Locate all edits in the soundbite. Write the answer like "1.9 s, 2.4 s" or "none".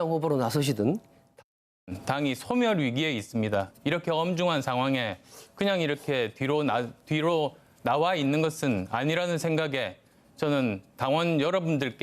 10.0 s